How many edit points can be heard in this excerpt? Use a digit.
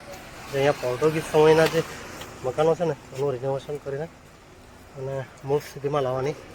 0